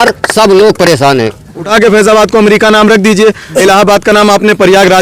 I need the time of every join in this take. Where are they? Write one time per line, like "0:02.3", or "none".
0:01.7
0:03.6

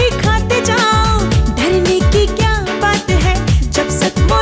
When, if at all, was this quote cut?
none

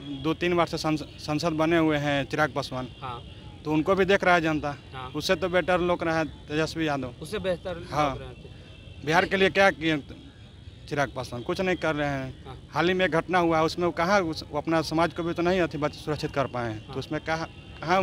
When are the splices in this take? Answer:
none

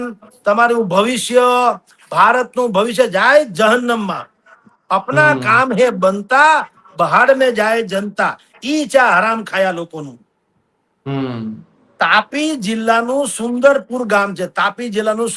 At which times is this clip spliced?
none

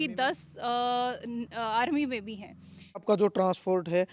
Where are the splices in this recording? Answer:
0:03.0

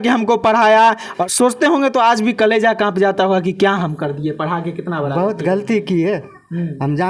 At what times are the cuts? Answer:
0:01.1

